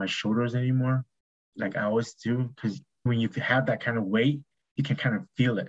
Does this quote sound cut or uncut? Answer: uncut